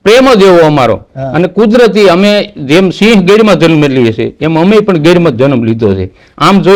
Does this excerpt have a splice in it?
no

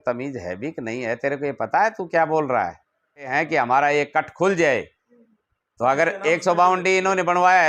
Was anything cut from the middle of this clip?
yes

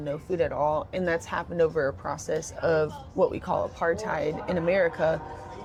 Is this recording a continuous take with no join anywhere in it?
yes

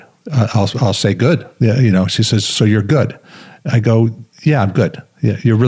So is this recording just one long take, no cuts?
yes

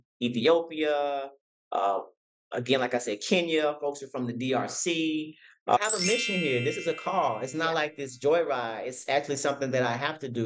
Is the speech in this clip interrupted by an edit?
yes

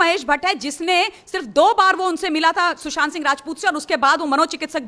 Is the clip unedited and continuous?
yes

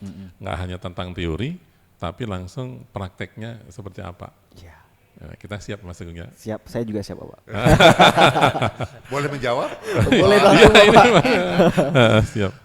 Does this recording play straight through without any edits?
yes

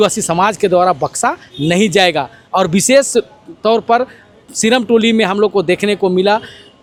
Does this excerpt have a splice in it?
no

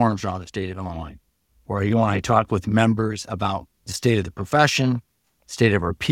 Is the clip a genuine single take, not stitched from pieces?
yes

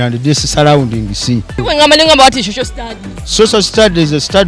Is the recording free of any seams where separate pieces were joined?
no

